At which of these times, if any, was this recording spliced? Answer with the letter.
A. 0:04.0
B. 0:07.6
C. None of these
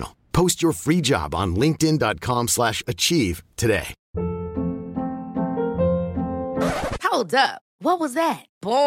A